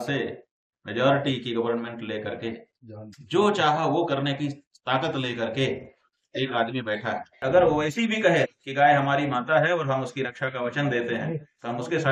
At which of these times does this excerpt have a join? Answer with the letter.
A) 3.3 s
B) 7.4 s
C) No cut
B